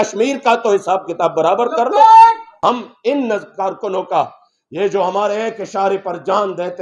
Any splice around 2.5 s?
yes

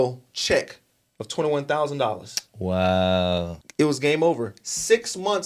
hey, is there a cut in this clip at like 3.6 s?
yes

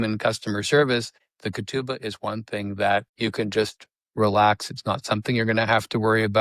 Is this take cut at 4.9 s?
no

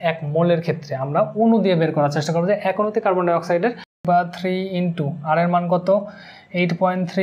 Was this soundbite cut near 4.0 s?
yes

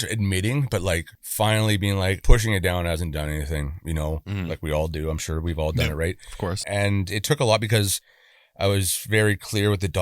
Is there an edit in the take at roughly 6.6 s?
yes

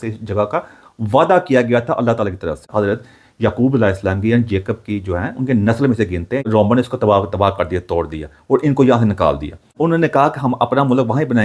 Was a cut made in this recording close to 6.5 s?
yes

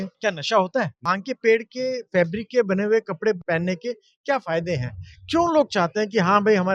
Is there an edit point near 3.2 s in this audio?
no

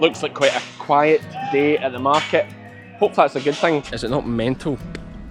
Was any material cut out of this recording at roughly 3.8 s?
yes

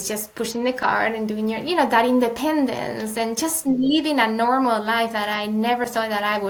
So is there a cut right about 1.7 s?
no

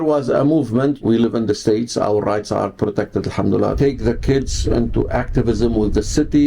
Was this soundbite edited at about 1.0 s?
yes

